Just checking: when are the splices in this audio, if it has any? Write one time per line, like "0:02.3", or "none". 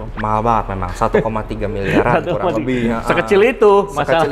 none